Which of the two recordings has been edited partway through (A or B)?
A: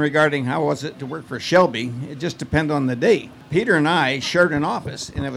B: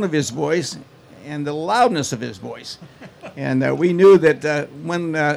A